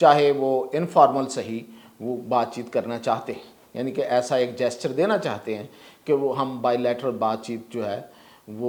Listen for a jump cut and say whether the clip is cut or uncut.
uncut